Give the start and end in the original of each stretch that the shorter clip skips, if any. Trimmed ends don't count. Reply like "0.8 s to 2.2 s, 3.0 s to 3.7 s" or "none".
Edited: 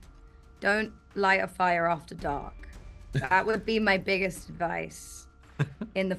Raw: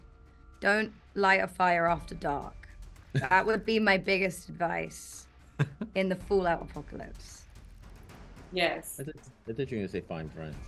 none